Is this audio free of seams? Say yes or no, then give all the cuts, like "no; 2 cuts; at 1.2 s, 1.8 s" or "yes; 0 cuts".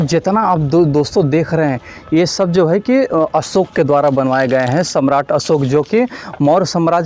yes; 0 cuts